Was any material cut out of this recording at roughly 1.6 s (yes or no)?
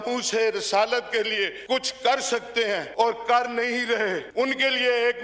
yes